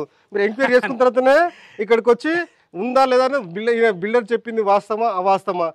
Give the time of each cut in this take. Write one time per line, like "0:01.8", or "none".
none